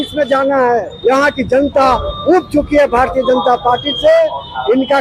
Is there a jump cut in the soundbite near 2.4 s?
no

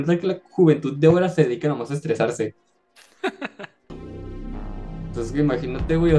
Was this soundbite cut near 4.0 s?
yes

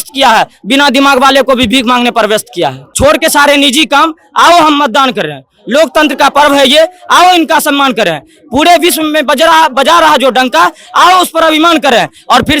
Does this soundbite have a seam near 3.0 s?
yes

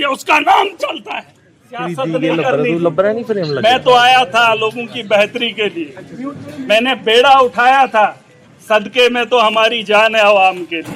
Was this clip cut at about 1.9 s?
yes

